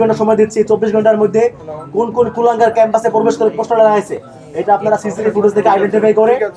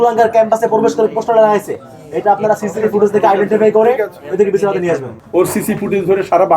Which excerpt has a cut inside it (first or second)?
second